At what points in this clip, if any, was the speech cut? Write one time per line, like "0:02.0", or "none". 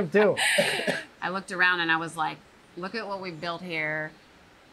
0:01.1